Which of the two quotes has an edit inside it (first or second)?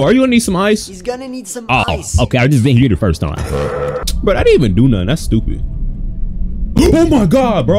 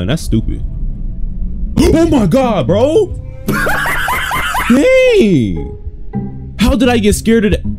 first